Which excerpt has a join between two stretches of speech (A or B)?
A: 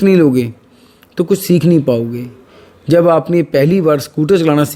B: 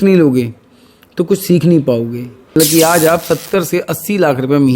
B